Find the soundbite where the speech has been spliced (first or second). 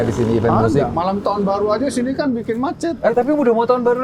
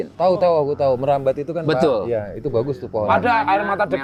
first